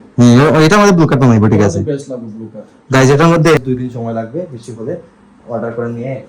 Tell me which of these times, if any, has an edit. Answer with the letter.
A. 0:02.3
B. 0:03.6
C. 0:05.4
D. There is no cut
B